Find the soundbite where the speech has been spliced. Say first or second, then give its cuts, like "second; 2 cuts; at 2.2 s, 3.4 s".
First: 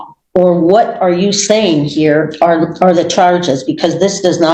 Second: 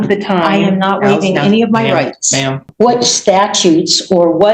second; 1 cut; at 2.6 s